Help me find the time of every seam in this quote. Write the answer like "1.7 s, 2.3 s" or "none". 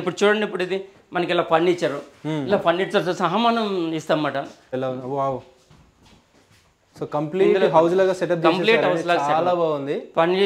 4.7 s